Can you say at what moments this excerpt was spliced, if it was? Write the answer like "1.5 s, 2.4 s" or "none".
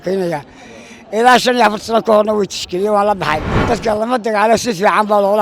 3.5 s